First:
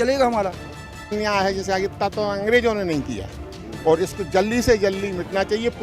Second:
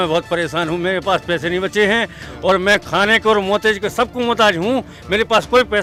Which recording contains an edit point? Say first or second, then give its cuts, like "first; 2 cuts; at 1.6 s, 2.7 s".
first; 1 cut; at 1.1 s